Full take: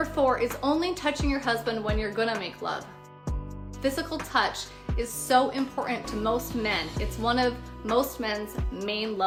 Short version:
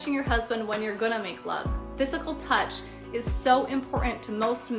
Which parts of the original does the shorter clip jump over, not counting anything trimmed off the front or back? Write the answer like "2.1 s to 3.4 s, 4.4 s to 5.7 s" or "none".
3.0 s to 3.6 s